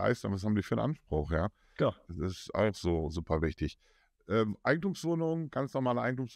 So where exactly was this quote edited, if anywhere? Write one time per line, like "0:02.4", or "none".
none